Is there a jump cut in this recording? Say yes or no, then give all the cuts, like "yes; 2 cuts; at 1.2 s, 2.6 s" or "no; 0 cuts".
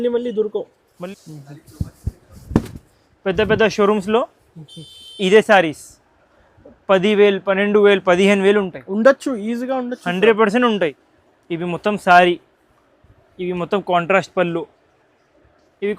yes; 2 cuts; at 0.9 s, 10.8 s